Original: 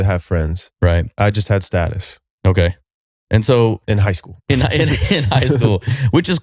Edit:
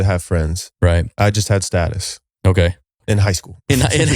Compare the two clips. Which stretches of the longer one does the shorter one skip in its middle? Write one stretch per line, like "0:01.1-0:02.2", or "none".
0:03.0-0:03.8